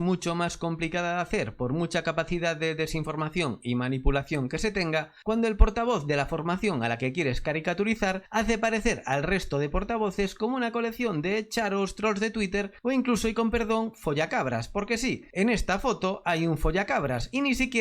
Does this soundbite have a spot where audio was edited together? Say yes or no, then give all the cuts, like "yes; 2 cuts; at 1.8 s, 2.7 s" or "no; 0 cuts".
no; 0 cuts